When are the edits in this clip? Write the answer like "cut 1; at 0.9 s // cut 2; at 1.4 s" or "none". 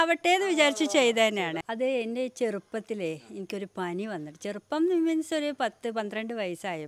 cut 1; at 1.8 s